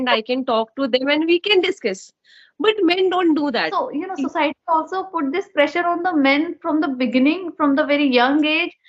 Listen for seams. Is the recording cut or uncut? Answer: cut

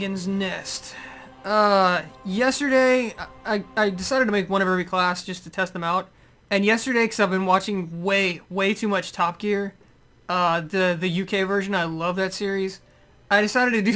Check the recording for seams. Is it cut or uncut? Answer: uncut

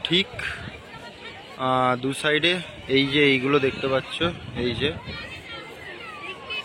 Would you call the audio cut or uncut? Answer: uncut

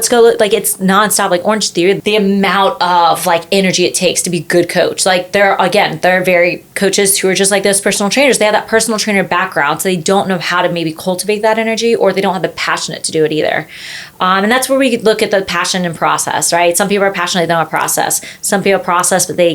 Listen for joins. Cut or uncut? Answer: cut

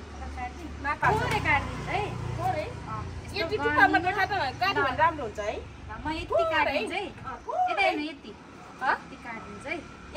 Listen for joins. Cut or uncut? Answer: cut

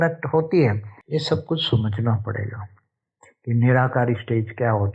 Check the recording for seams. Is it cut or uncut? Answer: cut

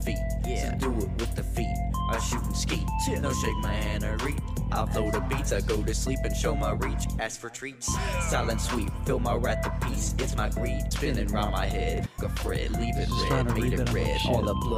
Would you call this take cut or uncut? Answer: uncut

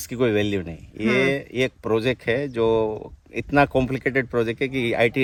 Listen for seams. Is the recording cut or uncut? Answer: uncut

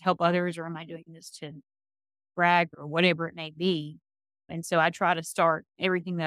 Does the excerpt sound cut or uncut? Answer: uncut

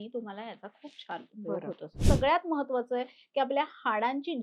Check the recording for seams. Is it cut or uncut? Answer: cut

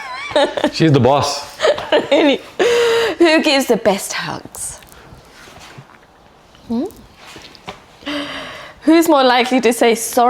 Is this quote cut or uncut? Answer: uncut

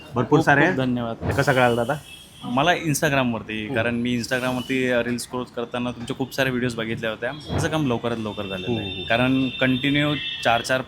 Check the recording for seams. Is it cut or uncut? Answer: cut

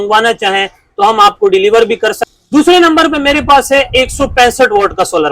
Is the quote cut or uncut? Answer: cut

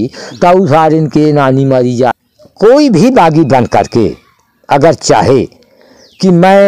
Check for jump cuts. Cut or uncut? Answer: cut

